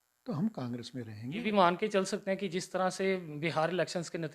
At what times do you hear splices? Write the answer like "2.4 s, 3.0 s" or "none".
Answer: 1.4 s